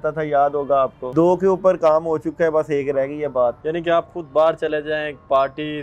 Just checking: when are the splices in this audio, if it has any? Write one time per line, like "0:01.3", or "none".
0:01.0
0:03.6